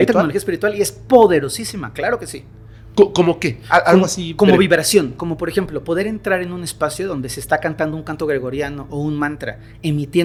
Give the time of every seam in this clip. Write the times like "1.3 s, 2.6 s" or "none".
none